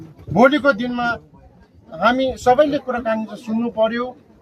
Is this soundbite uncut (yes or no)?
yes